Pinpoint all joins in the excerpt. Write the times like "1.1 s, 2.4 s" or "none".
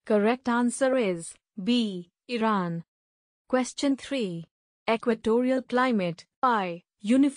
0.9 s, 6.6 s